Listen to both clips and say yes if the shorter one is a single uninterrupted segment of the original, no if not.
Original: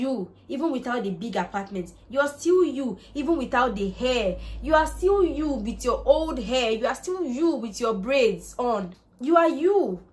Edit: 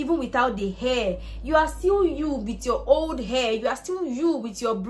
yes